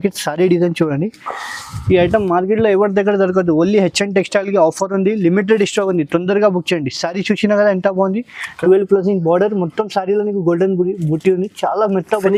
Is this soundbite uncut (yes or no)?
yes